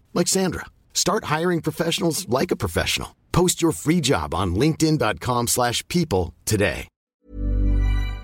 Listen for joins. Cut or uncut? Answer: cut